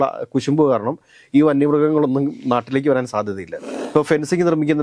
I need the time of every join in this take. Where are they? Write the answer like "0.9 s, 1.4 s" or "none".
3.5 s